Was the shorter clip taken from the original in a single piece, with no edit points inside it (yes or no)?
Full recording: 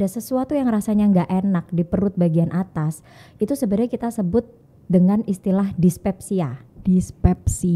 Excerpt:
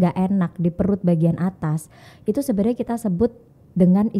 yes